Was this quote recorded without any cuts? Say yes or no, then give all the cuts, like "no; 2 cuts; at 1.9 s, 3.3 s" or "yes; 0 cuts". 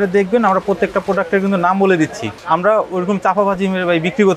no; 1 cut; at 2.3 s